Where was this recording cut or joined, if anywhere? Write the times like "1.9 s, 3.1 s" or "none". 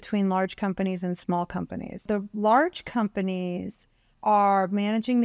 2.0 s